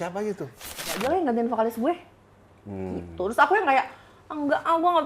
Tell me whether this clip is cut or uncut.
cut